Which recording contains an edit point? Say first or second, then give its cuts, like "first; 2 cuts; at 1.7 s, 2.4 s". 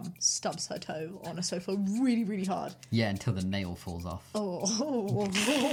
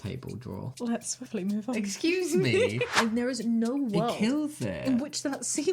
second; 1 cut; at 2.9 s